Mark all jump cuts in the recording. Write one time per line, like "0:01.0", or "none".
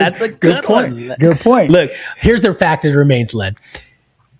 none